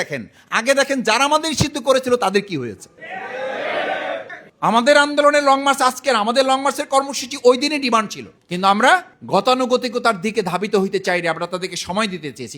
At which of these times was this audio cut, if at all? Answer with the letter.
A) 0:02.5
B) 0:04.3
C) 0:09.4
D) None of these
B